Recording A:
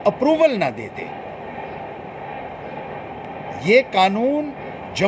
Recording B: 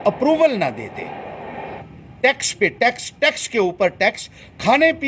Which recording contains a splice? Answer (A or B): B